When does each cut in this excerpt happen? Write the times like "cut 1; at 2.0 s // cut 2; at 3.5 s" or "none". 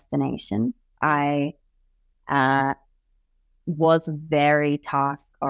none